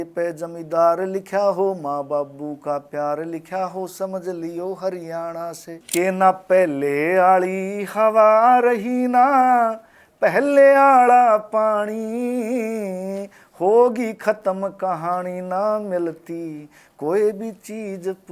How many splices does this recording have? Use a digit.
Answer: 1